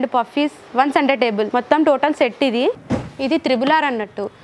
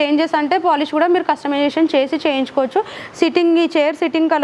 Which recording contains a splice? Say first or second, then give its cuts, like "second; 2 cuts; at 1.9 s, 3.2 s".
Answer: first; 2 cuts; at 1.5 s, 2.8 s